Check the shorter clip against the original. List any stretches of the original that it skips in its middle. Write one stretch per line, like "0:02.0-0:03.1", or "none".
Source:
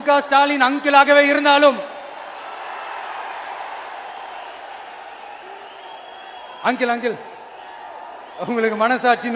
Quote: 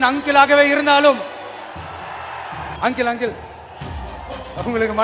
0:03.3-0:06.6